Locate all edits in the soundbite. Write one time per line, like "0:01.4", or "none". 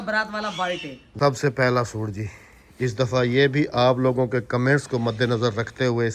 0:01.0